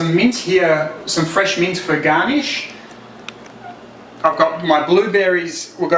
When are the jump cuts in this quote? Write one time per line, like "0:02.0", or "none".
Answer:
none

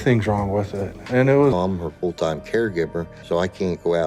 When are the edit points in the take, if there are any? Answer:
0:01.5

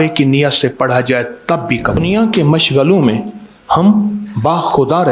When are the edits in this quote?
0:02.0

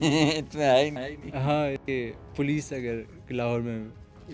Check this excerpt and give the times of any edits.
0:01.8

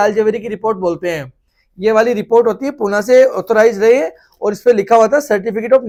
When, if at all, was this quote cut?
none

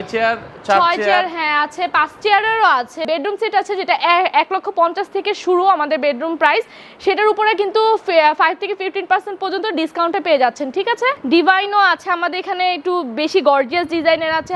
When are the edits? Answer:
0:03.0
0:11.2

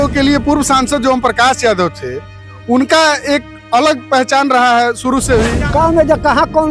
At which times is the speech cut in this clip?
0:05.6

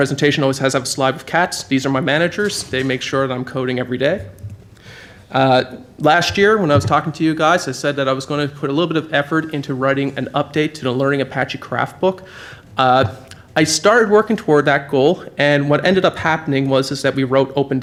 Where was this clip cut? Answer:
none

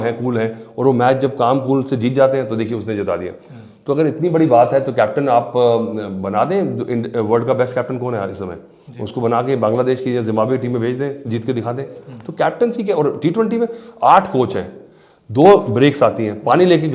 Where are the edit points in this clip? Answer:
none

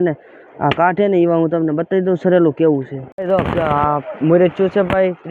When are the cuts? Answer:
0:03.0

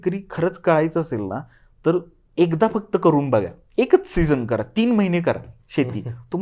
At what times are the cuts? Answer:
none

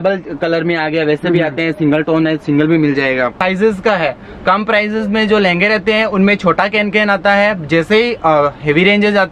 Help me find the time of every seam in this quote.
0:03.4

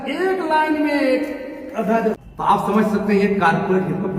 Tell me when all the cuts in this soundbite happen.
0:02.2

